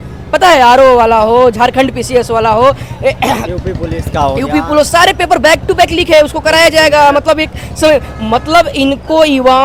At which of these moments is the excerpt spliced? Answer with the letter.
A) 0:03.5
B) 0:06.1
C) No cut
C